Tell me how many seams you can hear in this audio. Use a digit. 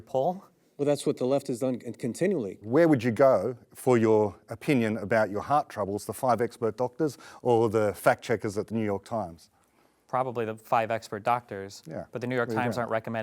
1